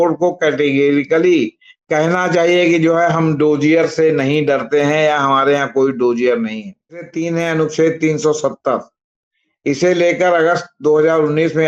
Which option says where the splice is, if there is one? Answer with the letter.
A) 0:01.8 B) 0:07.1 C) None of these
B